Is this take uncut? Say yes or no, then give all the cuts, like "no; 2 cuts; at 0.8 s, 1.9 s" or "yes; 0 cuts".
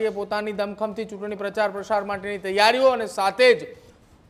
yes; 0 cuts